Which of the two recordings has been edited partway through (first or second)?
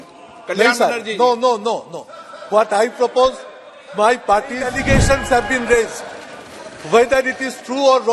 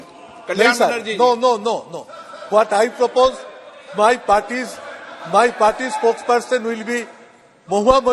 first